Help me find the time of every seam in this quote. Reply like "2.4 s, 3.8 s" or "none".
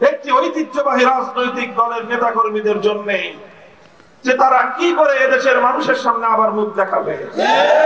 none